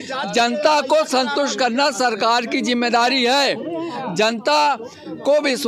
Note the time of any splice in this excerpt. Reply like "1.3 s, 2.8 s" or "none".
none